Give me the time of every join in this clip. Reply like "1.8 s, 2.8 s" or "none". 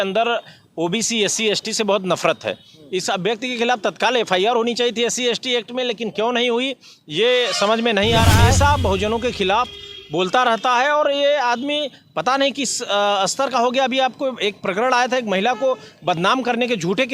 8.5 s